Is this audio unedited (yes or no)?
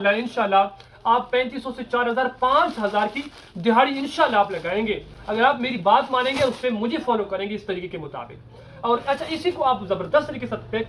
yes